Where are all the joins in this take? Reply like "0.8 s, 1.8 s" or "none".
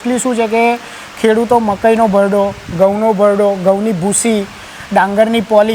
none